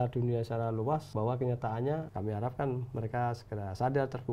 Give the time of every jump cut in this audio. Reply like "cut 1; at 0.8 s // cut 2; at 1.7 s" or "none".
cut 1; at 1.1 s // cut 2; at 2.1 s